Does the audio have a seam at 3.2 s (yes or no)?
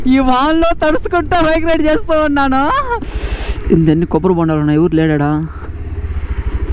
yes